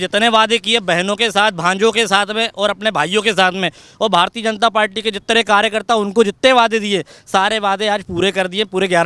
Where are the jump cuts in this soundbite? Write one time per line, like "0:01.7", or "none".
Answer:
none